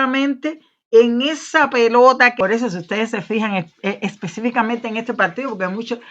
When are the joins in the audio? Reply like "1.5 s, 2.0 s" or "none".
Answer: 2.3 s